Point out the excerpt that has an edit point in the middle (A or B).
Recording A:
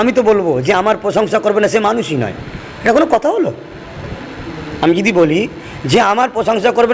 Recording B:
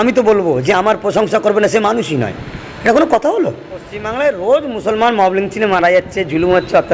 B